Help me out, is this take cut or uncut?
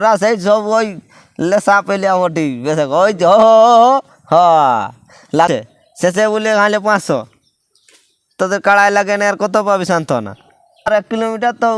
cut